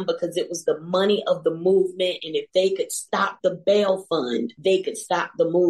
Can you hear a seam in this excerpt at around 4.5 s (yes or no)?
yes